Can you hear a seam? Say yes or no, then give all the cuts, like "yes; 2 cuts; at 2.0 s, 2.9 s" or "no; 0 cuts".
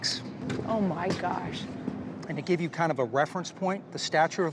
yes; 1 cut; at 2.1 s